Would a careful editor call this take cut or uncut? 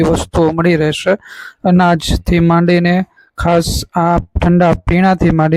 uncut